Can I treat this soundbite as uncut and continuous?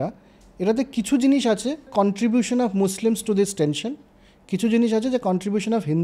no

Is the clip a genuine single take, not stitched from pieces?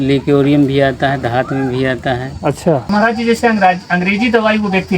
no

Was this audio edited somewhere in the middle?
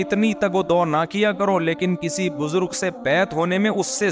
no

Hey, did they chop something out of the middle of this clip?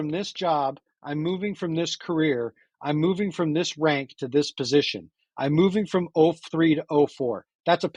no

